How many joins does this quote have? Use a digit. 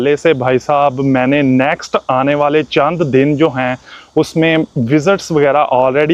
0